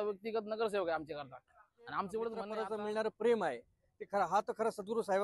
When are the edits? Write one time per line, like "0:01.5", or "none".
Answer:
0:02.4